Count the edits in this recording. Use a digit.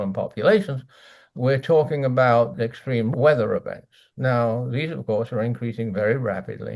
1